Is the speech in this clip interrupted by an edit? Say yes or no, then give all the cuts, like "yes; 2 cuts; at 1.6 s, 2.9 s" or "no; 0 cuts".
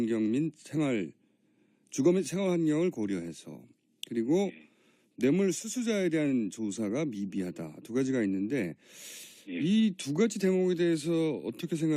no; 0 cuts